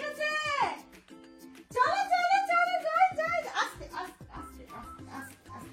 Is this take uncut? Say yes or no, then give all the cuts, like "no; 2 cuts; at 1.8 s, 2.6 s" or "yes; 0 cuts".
yes; 0 cuts